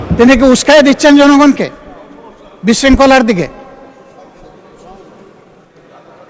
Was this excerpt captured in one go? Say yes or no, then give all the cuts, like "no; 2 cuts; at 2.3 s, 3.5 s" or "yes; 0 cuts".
yes; 0 cuts